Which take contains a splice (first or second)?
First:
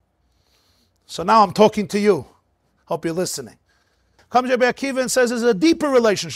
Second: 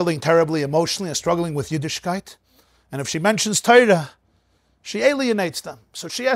first